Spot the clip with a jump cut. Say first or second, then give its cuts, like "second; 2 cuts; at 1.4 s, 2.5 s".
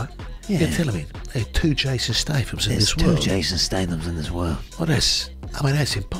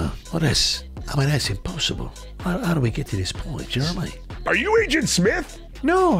second; 1 cut; at 4.6 s